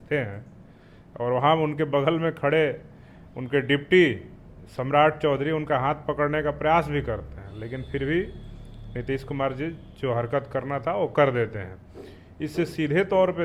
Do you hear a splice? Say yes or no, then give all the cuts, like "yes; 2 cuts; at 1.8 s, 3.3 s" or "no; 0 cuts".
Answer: no; 0 cuts